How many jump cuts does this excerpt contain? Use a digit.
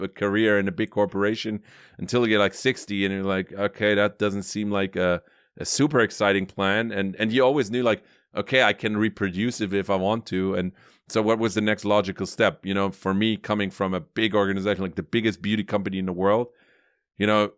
0